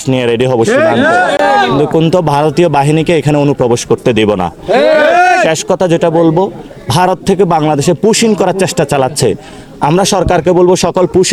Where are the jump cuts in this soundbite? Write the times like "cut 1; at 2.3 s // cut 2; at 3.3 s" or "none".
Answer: none